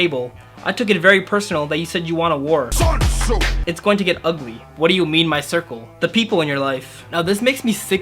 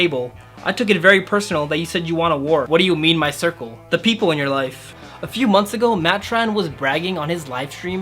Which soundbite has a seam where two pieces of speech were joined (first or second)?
second